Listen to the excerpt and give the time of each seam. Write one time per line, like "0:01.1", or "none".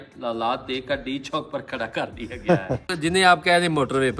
0:02.9